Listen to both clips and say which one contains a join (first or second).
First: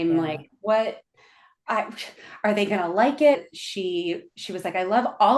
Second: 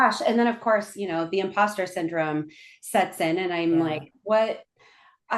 first